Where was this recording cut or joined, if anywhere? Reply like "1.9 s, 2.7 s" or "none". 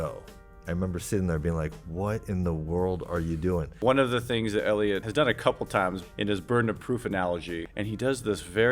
3.7 s, 5.1 s, 6.0 s, 7.6 s